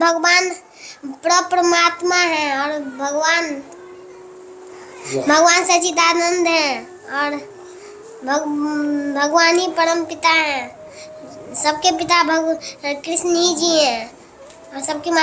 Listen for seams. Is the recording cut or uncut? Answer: uncut